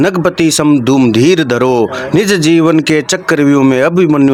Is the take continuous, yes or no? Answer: yes